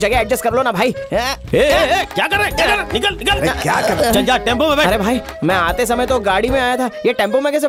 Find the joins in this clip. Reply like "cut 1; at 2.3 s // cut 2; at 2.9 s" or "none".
none